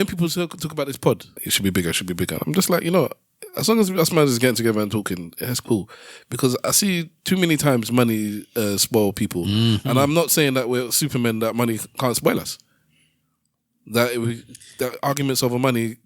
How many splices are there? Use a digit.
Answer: 1